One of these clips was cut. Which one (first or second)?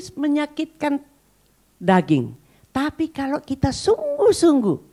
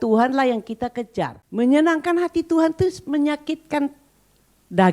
second